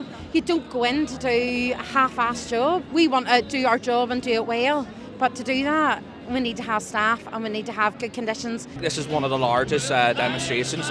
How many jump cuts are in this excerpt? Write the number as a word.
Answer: two